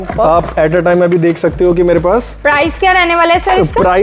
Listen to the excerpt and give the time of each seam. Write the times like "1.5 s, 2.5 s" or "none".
none